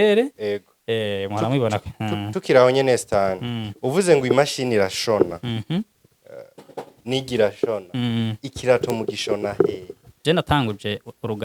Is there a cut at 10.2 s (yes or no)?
yes